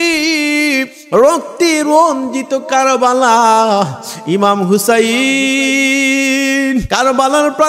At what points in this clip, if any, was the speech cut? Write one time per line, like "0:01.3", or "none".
0:01.0
0:06.9